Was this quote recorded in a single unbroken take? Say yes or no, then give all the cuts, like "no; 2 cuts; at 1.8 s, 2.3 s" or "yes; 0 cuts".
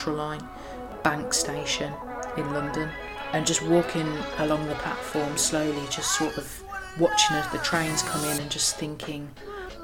no; 1 cut; at 0.9 s